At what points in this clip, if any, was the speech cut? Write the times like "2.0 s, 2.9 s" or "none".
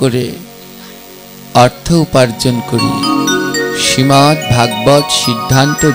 none